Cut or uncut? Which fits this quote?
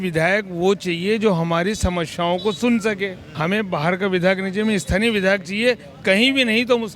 cut